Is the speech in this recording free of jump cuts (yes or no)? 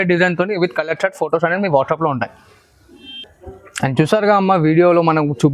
yes